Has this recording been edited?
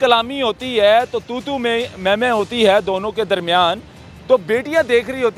no; 0 cuts

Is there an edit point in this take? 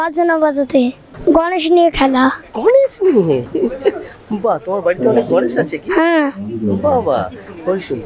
yes; 1 cut; at 1.1 s

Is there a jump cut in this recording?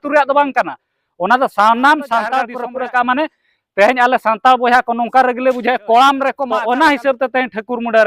yes; 2 cuts; at 2.6 s, 6.4 s

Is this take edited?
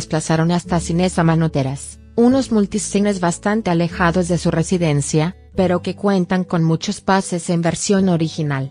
no; 0 cuts

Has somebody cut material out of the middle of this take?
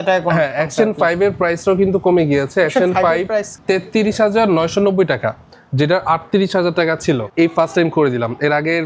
yes; 2 cuts; at 3.5 s, 7.3 s

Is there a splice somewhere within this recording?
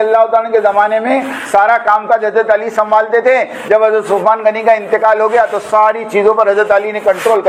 no; 0 cuts

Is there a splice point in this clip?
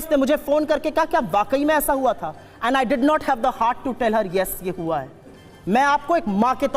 no; 0 cuts

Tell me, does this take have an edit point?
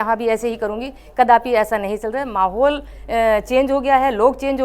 no; 0 cuts

